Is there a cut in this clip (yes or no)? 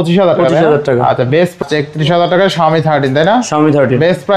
yes